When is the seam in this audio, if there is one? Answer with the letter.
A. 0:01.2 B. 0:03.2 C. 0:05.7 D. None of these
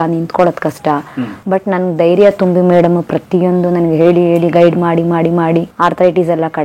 C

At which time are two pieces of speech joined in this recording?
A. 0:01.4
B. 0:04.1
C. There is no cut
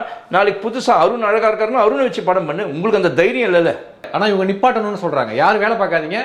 B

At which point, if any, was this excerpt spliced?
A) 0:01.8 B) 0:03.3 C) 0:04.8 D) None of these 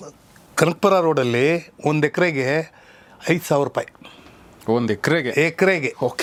D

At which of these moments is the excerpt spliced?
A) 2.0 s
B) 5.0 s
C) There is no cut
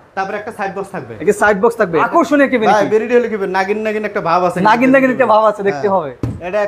A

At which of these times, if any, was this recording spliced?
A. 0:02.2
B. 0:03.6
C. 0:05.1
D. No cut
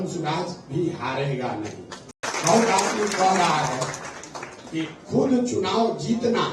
A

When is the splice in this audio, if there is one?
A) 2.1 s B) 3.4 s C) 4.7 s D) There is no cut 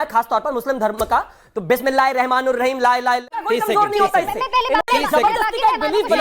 B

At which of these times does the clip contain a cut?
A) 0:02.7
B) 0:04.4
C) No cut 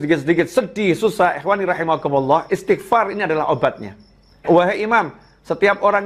B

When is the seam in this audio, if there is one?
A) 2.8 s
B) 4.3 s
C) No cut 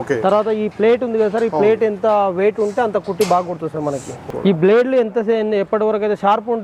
B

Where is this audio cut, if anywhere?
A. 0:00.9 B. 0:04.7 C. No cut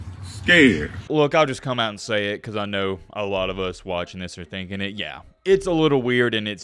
A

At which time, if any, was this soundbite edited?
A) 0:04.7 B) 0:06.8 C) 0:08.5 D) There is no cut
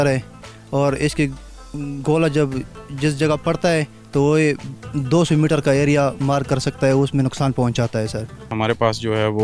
C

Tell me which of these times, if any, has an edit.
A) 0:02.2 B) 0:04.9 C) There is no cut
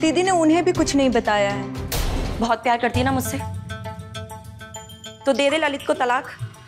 A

